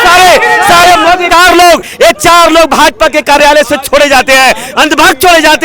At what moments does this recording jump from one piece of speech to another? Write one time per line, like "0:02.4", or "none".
0:01.3